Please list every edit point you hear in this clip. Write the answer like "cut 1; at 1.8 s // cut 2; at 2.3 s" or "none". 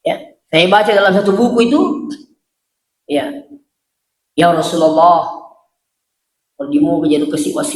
none